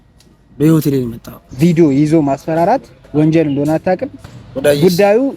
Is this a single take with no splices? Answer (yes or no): no